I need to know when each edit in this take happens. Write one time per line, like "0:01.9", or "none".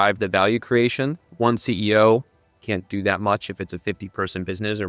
0:01.2